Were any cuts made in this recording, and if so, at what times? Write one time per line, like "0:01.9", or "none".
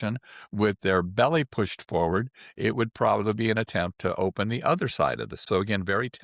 0:05.3